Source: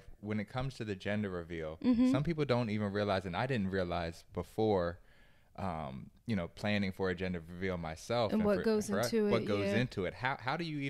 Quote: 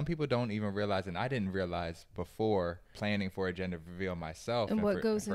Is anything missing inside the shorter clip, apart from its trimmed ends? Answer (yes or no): yes